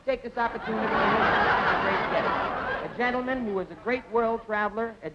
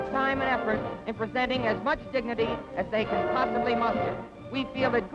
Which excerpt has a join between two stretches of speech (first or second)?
second